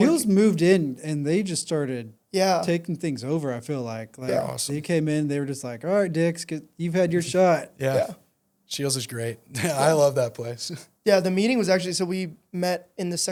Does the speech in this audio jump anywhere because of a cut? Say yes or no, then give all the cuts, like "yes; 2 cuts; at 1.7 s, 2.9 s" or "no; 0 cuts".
no; 0 cuts